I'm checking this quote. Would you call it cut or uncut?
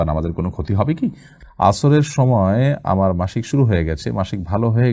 cut